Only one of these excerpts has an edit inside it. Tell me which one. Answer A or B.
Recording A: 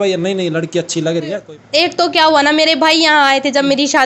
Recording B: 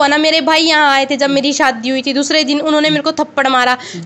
A